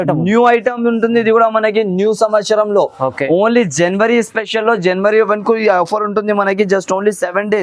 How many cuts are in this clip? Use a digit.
0